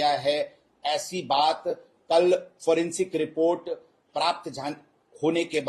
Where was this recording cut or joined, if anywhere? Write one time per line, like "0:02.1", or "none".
none

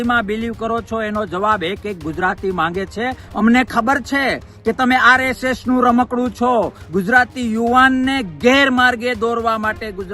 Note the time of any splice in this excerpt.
0:03.2
0:06.8

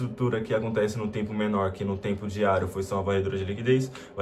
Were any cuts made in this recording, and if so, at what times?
none

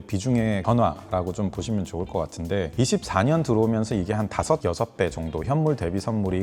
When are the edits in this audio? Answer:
0:02.7

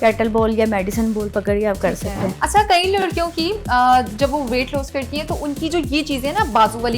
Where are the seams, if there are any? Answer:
0:02.4

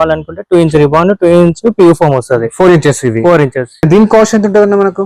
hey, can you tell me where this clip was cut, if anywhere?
0:03.7

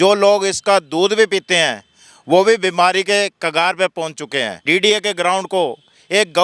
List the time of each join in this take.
0:04.6

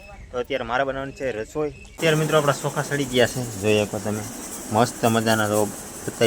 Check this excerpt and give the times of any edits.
0:02.0

